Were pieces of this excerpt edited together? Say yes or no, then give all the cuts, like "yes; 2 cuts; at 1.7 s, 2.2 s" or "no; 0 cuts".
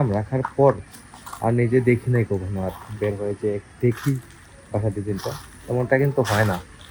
no; 0 cuts